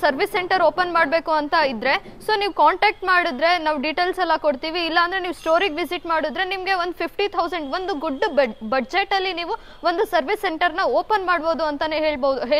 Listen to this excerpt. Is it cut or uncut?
uncut